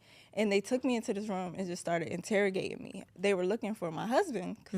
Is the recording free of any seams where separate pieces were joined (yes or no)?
no